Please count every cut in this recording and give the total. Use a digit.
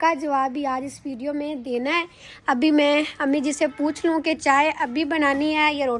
0